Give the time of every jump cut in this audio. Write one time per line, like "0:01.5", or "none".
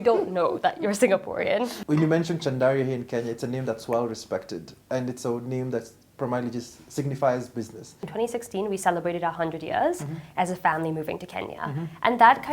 0:01.8
0:08.1

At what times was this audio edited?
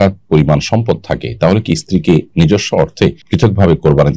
0:03.2

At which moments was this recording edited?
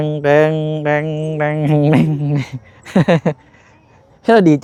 none

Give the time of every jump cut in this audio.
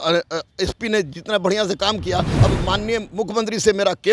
0:02.3

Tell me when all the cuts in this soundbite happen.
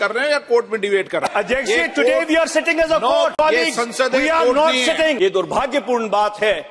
0:01.3
0:03.3
0:05.2

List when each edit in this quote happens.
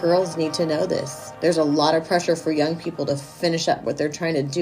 0:01.2

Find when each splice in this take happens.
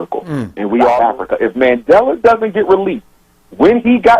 0:01.0

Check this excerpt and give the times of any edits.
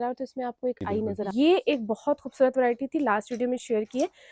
0:01.3

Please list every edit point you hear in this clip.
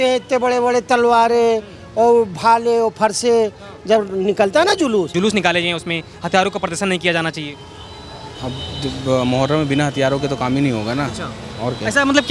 0:05.1

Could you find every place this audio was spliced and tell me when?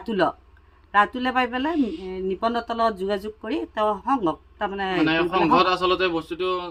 none

